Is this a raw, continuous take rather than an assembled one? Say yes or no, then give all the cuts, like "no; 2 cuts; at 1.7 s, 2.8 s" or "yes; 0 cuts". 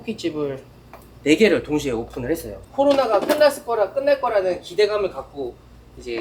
yes; 0 cuts